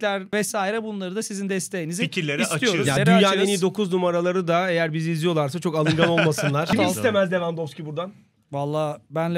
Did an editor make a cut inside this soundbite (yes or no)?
yes